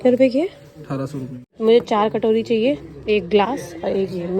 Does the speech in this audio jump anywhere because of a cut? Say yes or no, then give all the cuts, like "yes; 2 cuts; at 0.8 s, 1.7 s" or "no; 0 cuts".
yes; 1 cut; at 1.6 s